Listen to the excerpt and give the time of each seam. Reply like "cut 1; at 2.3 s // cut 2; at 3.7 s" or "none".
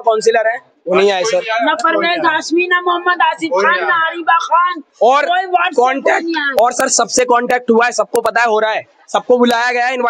none